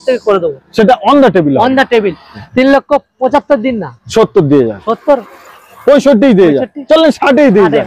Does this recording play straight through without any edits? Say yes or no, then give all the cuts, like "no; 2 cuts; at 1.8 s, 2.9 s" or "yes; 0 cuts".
no; 1 cut; at 2.4 s